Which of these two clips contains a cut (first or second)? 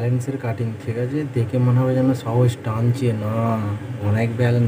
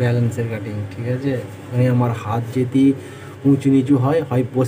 second